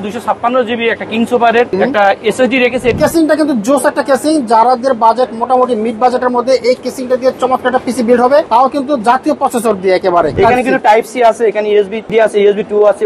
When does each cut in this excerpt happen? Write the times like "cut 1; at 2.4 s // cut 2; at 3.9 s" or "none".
cut 1; at 1.7 s // cut 2; at 3.0 s // cut 3; at 8.5 s // cut 4; at 10.3 s // cut 5; at 12.0 s